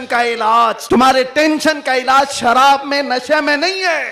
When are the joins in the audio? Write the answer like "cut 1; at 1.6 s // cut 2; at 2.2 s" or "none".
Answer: cut 1; at 1.3 s

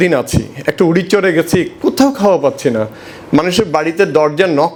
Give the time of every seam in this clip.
none

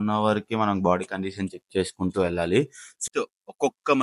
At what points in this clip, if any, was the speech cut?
cut 1; at 3.0 s

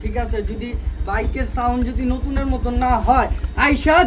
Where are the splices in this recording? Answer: none

